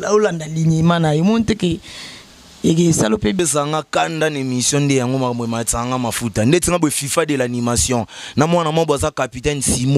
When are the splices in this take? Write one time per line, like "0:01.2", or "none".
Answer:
0:03.4